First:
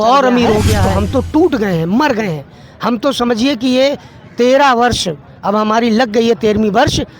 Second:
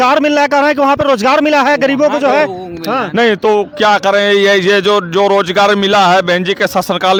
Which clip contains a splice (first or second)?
first